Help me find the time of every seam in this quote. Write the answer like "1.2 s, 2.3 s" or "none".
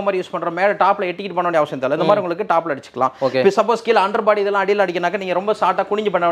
none